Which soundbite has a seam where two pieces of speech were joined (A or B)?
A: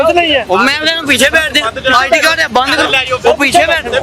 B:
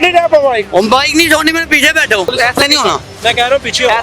B